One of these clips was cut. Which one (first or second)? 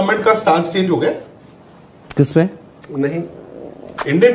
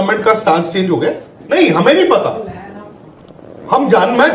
second